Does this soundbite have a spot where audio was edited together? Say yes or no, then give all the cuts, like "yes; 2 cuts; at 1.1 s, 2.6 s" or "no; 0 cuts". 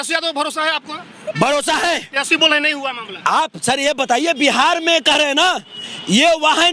no; 0 cuts